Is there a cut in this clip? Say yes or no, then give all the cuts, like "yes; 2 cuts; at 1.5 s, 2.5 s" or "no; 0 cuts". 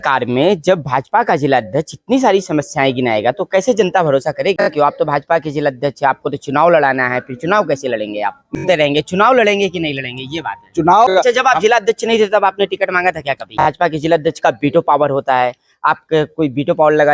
yes; 4 cuts; at 4.7 s, 8.6 s, 11.1 s, 13.6 s